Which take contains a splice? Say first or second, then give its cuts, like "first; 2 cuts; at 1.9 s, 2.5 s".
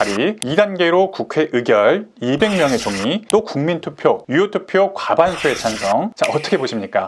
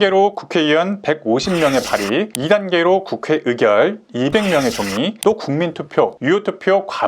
first; 1 cut; at 6.1 s